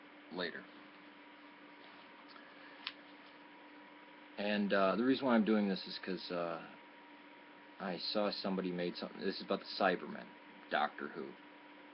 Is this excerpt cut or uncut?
cut